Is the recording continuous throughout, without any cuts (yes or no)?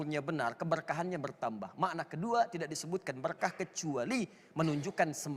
yes